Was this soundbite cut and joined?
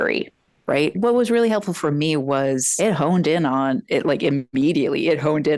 yes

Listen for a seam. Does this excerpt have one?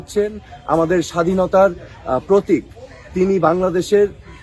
no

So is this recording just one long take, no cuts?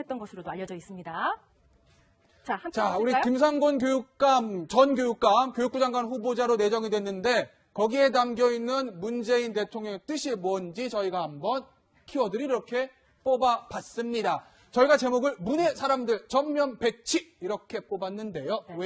yes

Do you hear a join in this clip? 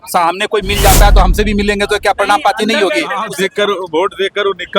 yes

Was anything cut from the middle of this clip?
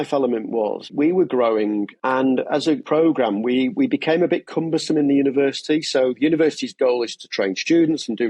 yes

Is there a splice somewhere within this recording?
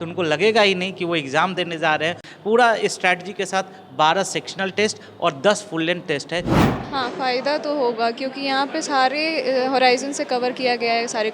yes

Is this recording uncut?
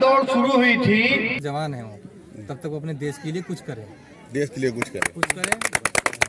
no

